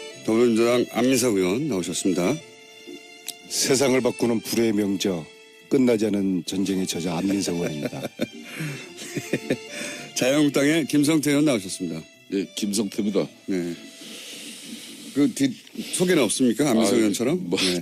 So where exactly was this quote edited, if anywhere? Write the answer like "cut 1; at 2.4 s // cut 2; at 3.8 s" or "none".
none